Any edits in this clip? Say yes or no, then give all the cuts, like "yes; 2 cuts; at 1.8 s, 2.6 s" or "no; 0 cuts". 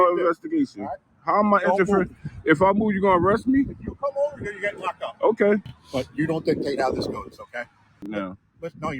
yes; 2 cuts; at 5.8 s, 8.1 s